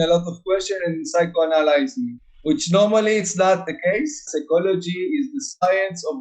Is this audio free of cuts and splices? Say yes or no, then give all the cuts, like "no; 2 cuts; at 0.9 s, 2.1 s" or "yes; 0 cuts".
no; 1 cut; at 3.9 s